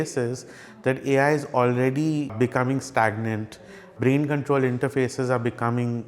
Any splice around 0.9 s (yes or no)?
no